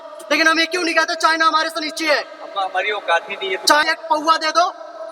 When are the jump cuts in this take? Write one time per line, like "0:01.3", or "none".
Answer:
0:03.8